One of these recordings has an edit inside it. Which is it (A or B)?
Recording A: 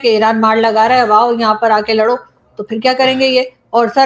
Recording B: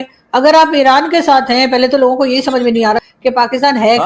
B